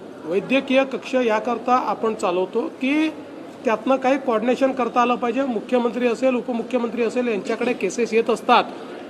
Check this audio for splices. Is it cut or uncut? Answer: uncut